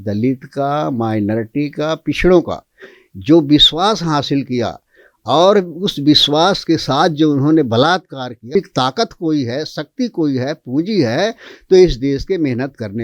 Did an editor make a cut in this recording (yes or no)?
yes